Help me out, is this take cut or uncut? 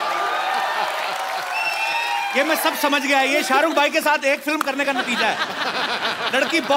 uncut